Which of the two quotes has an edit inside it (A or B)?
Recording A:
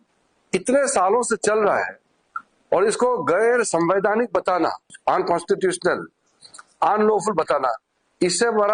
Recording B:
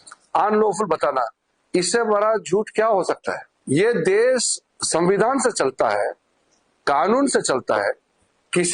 B